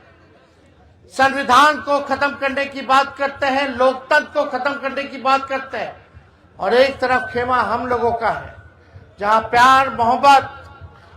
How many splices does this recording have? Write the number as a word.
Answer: zero